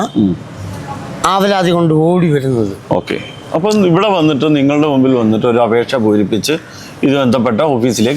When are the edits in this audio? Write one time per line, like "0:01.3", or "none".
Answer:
none